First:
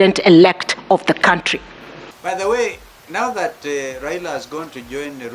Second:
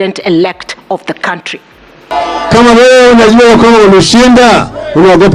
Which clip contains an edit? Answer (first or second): first